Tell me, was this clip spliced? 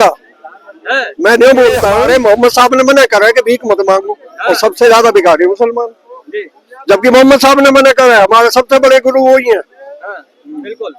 yes; 1 cut; at 2.0 s

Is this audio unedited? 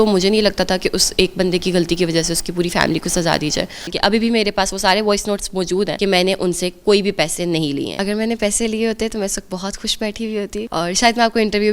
no; 4 cuts; at 3.9 s, 5.9 s, 7.9 s, 10.7 s

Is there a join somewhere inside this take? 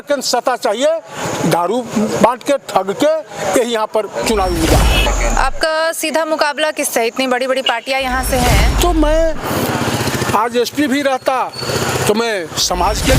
yes; 2 cuts; at 5.1 s, 8.7 s

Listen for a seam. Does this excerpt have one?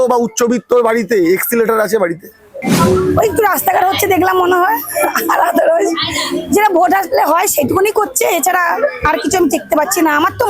yes; 1 cut; at 2.6 s

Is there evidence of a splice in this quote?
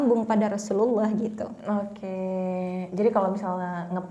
no; 0 cuts

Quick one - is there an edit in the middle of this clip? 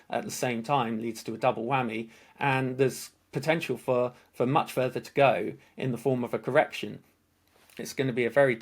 yes; 1 cut; at 7.7 s

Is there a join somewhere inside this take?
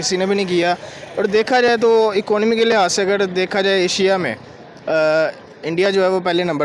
no; 0 cuts

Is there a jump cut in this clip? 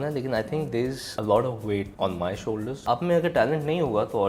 yes; 3 cuts; at 1.1 s, 1.9 s, 2.8 s

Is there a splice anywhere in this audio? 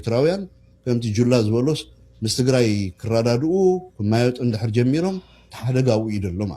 no; 0 cuts

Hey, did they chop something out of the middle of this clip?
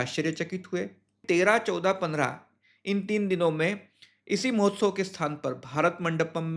yes; 1 cut; at 1.2 s

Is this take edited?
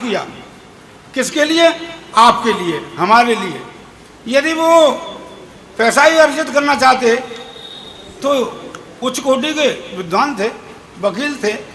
no; 0 cuts

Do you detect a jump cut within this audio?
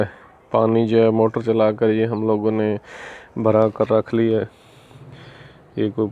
no; 0 cuts

